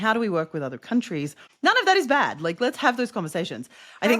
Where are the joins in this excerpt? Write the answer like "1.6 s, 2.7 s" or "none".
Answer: 1.4 s